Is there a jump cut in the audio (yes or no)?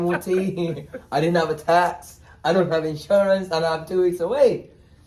no